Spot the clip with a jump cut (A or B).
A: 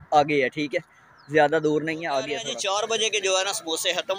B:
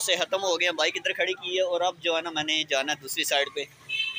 A